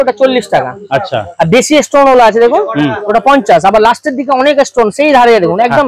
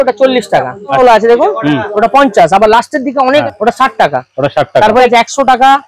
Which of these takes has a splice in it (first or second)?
second